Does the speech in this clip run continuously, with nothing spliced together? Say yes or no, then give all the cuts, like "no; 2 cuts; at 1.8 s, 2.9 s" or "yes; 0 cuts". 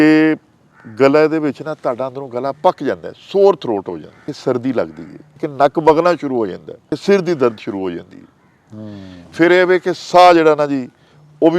no; 3 cuts; at 4.2 s, 5.5 s, 6.9 s